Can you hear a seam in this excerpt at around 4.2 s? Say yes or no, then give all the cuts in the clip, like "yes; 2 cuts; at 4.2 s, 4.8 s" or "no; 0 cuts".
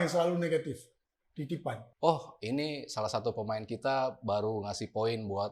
no; 1 cut; at 1.8 s